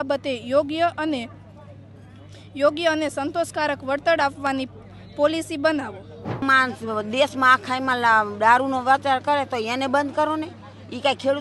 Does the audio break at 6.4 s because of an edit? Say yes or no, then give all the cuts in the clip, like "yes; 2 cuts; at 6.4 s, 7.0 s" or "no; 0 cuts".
yes; 1 cut; at 6.4 s